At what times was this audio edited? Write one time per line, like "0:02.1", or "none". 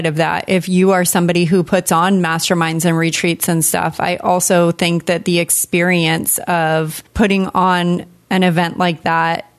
none